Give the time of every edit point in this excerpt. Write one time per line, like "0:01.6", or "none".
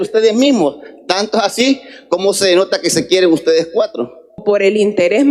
0:04.4